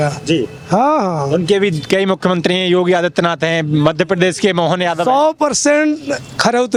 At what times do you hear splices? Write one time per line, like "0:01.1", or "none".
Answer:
none